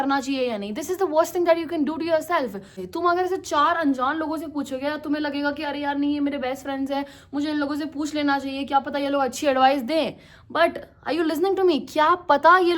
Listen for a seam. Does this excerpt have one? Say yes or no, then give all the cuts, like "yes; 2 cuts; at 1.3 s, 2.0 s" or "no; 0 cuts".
yes; 1 cut; at 2.8 s